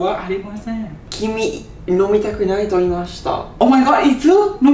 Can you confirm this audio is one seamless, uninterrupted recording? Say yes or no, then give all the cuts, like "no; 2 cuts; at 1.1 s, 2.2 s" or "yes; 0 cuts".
no; 2 cuts; at 1.0 s, 3.5 s